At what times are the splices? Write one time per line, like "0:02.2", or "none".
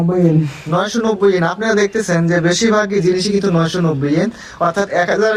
none